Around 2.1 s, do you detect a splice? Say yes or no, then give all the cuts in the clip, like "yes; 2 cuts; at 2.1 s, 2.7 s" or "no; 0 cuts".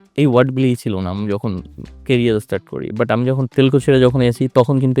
no; 1 cut; at 3.4 s